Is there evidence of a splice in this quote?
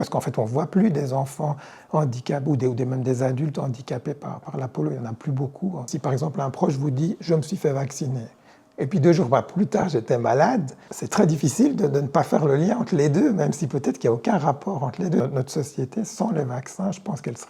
yes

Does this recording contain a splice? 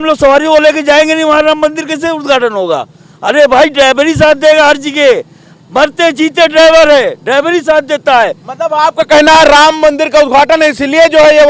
no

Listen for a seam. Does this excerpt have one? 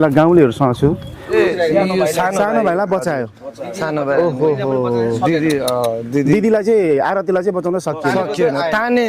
yes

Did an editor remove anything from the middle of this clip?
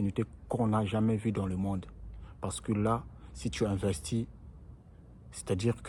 no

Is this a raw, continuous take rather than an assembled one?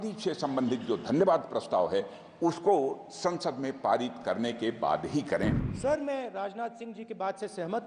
no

